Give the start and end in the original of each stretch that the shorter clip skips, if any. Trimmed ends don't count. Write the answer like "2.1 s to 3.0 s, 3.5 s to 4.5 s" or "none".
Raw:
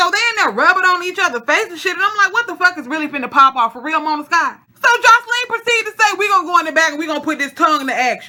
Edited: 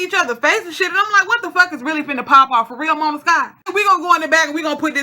4.7 s to 6.1 s